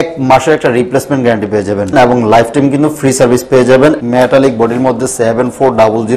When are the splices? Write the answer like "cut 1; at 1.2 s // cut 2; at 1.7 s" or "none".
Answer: cut 1; at 1.9 s // cut 2; at 4.0 s